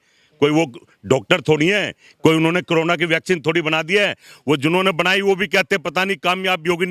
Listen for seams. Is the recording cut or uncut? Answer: uncut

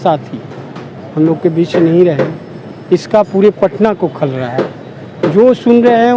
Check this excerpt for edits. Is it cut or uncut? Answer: uncut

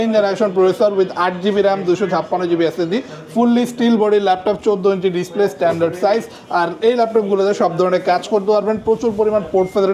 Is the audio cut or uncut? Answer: uncut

